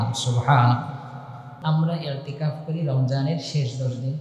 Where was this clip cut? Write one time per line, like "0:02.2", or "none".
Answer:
0:01.4